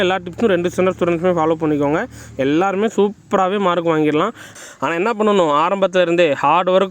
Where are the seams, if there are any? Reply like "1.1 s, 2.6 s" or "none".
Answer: 4.5 s